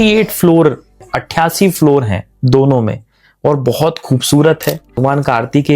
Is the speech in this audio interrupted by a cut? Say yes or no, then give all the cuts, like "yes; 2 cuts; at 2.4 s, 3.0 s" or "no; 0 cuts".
yes; 2 cuts; at 1.1 s, 5.0 s